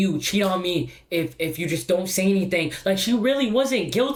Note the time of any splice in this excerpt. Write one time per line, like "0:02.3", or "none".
none